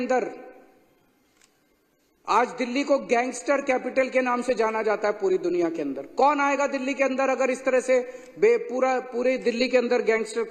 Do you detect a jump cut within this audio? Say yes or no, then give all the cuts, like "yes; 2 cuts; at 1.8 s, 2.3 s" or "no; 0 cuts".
no; 0 cuts